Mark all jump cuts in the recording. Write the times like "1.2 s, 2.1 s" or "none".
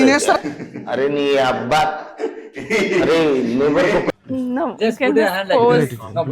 4.1 s